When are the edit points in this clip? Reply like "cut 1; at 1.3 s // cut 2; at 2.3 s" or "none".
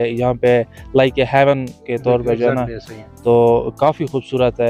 none